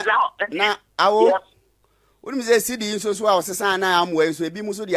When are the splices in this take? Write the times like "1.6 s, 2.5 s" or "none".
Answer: none